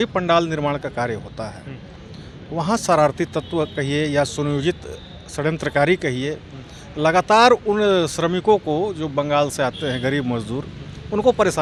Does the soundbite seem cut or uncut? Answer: uncut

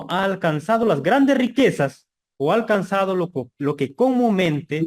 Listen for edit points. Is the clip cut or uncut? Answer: uncut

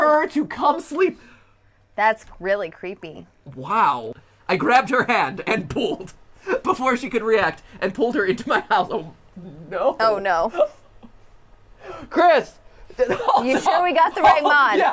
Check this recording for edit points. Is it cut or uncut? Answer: cut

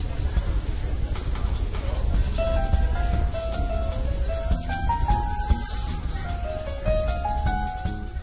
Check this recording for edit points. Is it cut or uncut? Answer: uncut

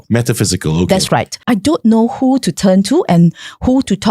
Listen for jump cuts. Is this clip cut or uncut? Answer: cut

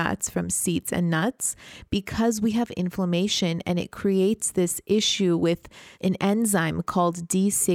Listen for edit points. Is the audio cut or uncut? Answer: uncut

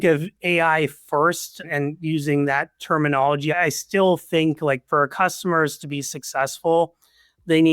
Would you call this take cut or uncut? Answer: cut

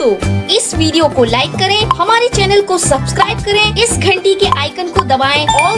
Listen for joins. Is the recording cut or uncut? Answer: uncut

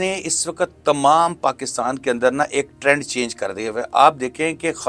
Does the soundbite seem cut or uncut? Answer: uncut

